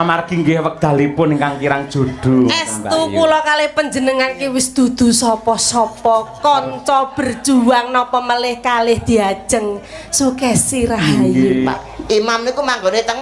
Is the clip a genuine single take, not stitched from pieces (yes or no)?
no